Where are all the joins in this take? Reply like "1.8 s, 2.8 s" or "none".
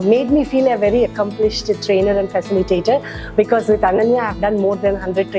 none

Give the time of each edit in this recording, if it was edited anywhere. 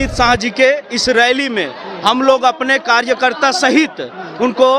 none

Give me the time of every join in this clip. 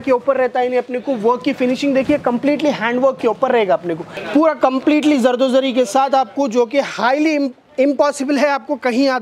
4.1 s

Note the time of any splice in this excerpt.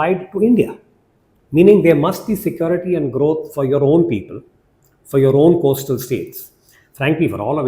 none

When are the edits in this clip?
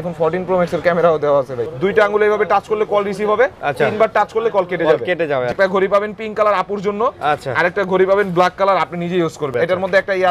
1.6 s, 5.5 s, 9.4 s

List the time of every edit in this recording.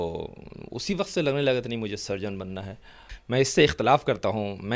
3.1 s

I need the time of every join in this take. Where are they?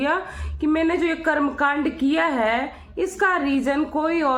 none

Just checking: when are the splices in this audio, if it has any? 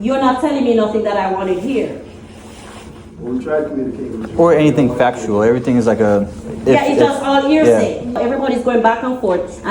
8.2 s

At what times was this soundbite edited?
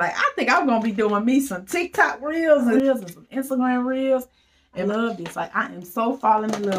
2.8 s, 4.9 s

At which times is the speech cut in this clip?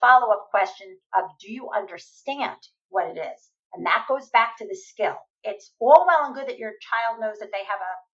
5.3 s

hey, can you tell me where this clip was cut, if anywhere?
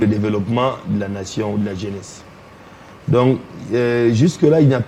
none

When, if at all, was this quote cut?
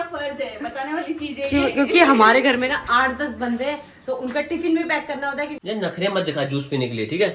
5.6 s

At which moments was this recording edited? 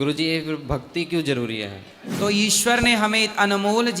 2.2 s

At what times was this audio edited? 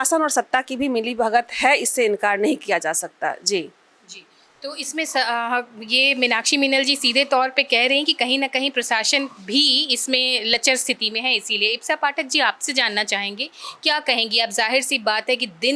none

